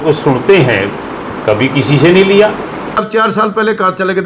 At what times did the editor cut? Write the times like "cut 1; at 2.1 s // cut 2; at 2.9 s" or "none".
cut 1; at 3.0 s